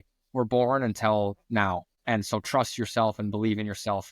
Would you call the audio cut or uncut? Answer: cut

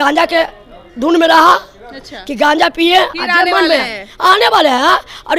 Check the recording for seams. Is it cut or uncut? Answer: uncut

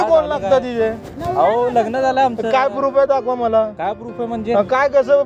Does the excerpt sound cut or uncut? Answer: uncut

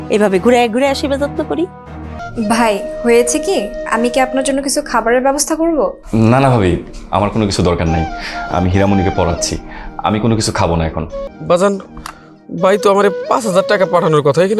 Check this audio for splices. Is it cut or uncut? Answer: cut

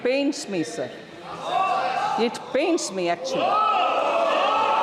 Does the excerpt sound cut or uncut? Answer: uncut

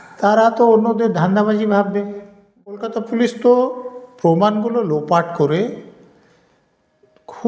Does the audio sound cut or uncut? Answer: cut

